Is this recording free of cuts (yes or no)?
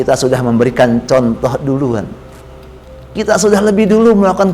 yes